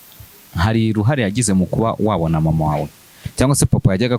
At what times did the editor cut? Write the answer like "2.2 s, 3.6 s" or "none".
none